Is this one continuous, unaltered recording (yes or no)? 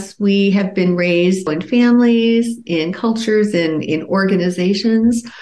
no